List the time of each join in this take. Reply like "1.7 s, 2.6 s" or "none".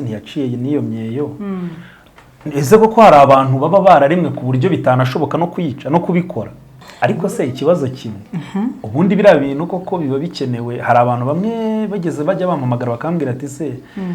6.8 s